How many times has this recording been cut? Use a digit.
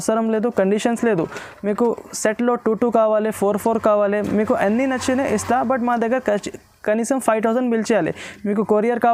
0